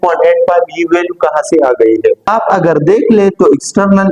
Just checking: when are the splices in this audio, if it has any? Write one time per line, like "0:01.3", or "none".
0:02.2